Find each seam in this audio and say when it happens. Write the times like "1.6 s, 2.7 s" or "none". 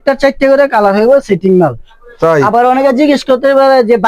none